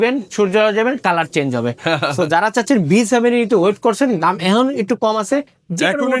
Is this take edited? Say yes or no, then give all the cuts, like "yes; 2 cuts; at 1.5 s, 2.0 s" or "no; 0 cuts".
no; 0 cuts